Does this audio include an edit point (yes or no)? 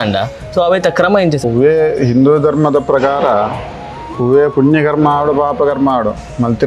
yes